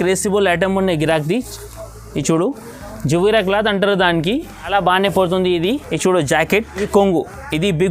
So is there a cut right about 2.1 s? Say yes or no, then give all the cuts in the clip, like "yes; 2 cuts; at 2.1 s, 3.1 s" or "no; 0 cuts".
no; 3 cuts; at 4.7 s, 5.9 s, 6.8 s